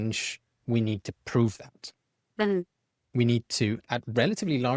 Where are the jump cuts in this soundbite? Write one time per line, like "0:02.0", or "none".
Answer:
none